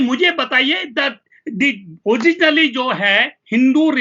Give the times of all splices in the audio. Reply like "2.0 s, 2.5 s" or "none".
none